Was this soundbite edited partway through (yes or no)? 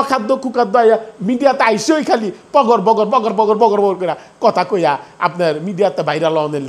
no